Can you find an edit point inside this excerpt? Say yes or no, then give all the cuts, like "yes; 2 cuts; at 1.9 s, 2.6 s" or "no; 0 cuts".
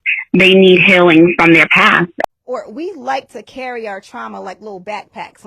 yes; 1 cut; at 2.3 s